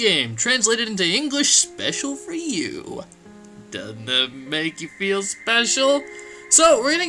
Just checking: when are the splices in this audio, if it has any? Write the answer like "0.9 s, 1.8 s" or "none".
5.2 s